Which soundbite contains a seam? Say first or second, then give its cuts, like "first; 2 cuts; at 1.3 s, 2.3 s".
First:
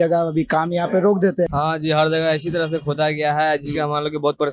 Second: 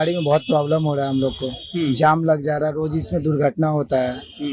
first; 1 cut; at 1.5 s